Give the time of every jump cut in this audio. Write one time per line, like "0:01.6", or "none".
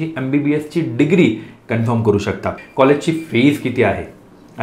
0:02.6